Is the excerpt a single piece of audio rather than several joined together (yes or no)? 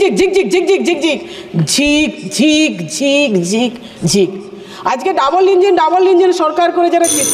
yes